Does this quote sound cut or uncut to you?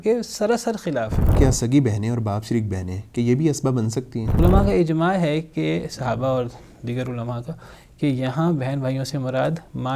cut